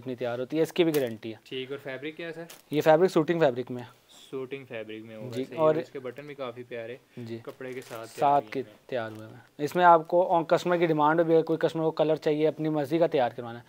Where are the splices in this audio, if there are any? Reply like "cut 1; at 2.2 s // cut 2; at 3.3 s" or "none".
none